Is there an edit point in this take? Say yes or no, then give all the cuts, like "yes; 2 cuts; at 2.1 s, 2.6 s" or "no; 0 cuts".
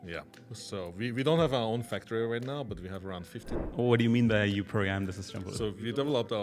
yes; 1 cut; at 3.7 s